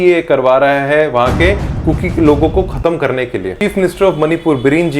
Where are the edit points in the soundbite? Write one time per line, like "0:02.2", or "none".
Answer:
0:03.5

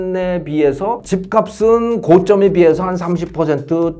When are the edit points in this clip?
0:01.0

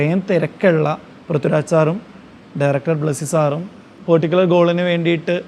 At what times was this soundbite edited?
0:01.1
0:03.9

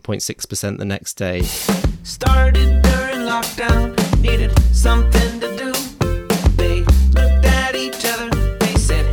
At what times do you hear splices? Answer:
0:01.5

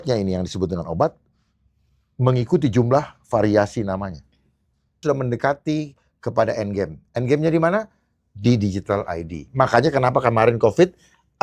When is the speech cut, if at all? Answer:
0:05.0

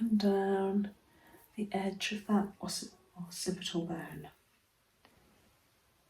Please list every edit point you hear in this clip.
0:05.1

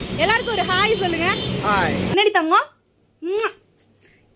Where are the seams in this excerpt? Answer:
0:02.1

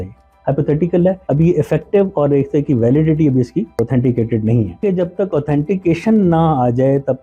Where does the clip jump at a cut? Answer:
0:01.2
0:03.8
0:04.8

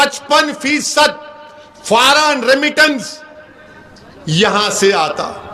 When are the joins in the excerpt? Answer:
none

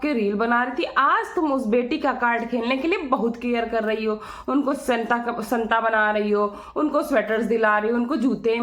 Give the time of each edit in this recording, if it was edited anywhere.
none

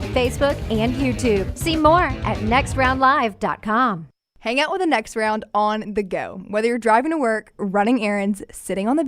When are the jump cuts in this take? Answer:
0:04.1

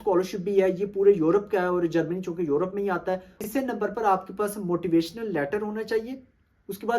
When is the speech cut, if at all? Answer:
0:03.4

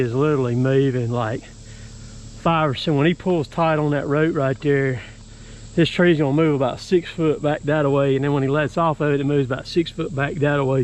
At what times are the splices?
none

